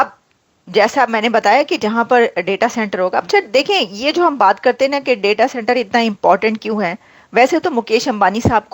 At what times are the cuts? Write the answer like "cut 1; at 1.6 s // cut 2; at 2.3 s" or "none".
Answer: none